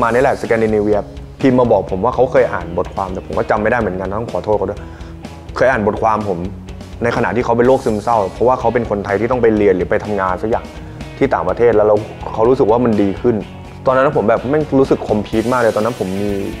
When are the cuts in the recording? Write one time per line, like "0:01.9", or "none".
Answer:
none